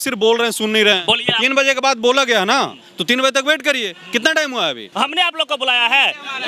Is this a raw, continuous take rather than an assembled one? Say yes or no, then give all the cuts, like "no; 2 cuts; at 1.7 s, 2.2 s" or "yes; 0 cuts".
no; 1 cut; at 4.9 s